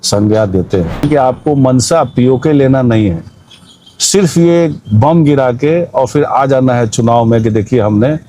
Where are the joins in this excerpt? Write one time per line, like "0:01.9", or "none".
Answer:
0:01.0